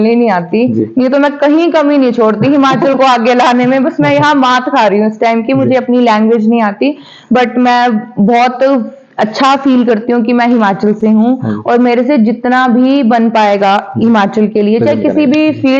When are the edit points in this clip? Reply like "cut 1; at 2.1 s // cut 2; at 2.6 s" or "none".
none